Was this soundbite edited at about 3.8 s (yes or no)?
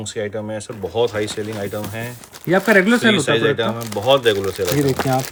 no